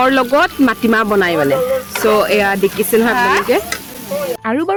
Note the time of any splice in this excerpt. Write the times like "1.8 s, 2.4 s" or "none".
none

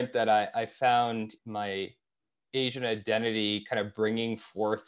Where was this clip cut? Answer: 1.4 s

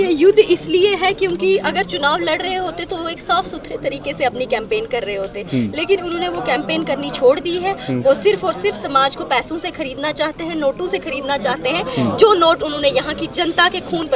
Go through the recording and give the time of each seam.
none

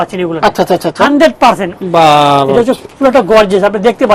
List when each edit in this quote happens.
1.7 s

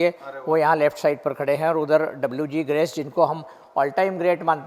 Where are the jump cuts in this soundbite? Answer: none

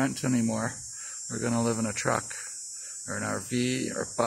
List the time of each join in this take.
none

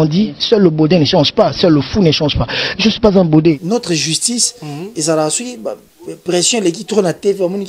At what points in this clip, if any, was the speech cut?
3.6 s

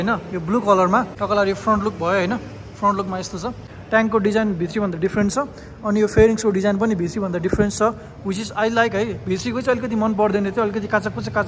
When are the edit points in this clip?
1.2 s, 3.7 s

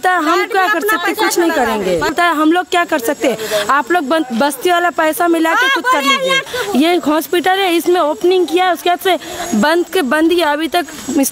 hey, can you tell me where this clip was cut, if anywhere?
2.1 s, 6.4 s

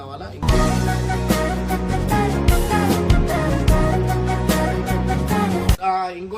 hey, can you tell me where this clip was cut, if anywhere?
none

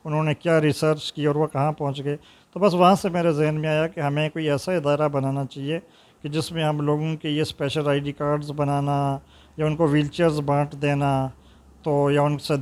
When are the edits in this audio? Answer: none

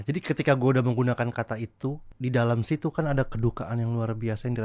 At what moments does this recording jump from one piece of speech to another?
2.1 s

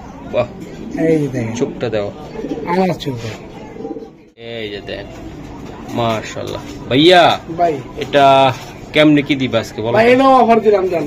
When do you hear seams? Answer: 4.4 s

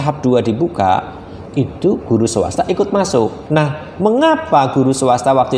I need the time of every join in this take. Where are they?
3.4 s

